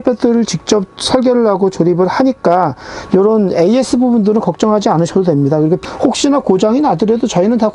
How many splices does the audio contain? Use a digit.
1